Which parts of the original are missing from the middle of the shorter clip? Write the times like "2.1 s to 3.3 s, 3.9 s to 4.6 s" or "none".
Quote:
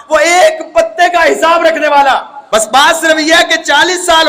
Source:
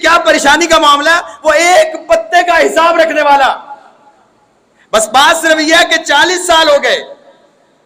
3.7 s to 4.8 s